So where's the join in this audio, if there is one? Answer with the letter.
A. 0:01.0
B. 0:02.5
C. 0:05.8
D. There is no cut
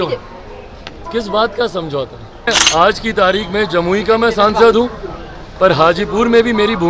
B